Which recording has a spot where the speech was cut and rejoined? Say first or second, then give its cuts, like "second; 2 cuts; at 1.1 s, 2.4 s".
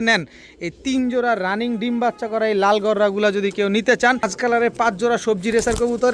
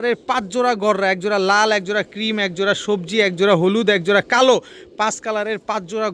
first; 1 cut; at 4.2 s